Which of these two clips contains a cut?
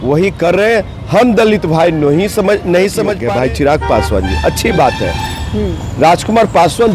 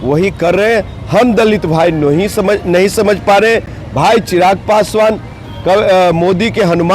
first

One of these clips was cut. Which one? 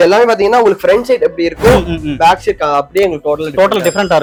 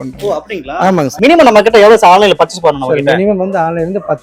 second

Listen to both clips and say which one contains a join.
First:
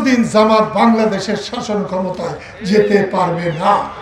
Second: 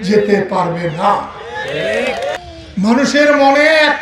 second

